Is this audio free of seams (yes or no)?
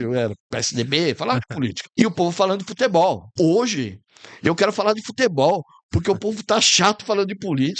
no